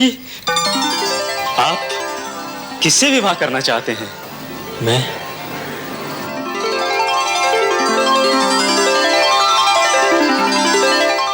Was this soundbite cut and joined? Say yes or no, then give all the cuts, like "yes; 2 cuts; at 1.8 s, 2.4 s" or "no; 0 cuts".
no; 0 cuts